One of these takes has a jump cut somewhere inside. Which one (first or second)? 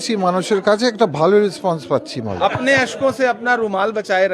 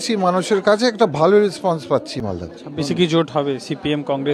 first